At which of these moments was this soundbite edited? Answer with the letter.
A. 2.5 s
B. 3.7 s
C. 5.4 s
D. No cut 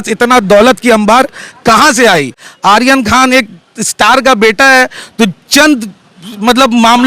A